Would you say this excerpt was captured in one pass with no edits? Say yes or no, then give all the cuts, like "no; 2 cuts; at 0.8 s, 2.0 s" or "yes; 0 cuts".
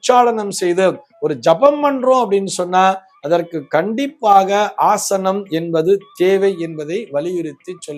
yes; 0 cuts